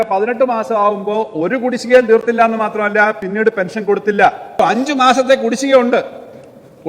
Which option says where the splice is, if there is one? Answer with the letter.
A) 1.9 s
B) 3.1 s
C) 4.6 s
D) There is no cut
C